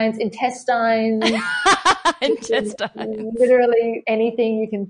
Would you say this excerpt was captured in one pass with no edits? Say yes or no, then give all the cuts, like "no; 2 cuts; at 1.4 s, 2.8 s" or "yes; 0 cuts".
no; 1 cut; at 4.0 s